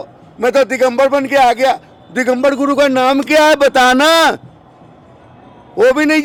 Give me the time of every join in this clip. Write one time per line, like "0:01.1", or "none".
none